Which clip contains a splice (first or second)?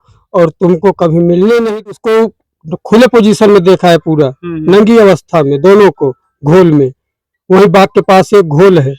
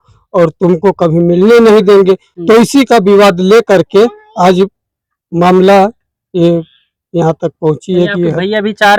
first